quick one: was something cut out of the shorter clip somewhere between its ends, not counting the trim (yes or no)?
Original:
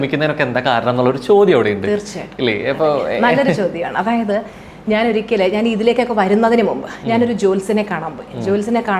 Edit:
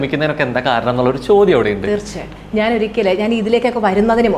yes